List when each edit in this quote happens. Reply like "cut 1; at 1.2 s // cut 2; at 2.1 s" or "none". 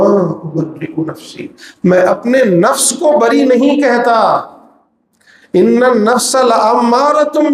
none